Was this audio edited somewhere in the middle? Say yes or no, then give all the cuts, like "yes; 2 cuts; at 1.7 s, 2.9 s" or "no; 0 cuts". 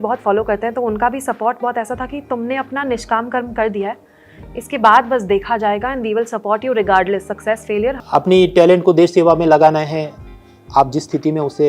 yes; 1 cut; at 8.0 s